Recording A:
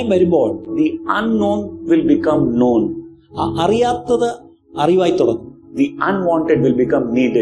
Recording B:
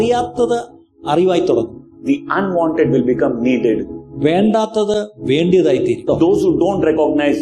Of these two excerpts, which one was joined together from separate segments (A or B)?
B